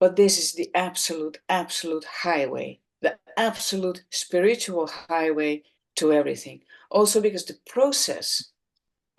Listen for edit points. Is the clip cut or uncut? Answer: uncut